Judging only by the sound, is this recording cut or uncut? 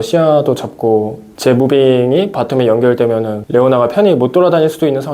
cut